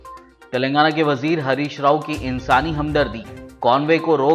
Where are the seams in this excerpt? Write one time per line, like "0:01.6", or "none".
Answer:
none

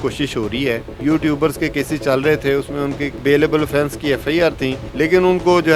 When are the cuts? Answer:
0:01.0
0:03.2
0:04.8

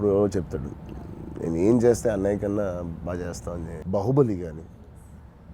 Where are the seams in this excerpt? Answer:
0:03.7

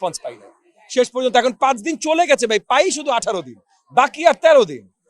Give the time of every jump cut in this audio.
0:02.8

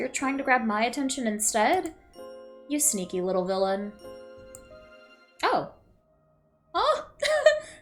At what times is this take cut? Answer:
none

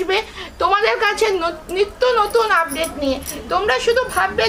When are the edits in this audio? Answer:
none

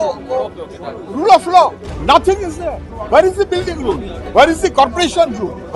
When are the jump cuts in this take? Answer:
0:01.9
0:02.9
0:04.1

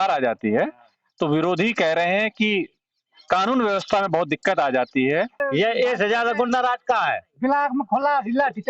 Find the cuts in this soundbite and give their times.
0:05.4

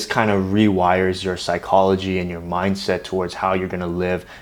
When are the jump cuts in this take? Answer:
none

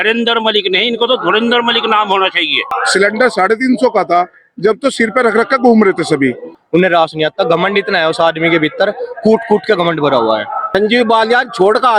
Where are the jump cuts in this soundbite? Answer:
0:02.7
0:06.5
0:10.7

